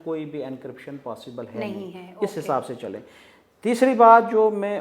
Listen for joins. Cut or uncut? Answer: uncut